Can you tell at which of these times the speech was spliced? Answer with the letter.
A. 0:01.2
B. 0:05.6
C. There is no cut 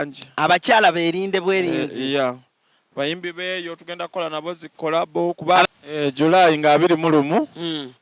B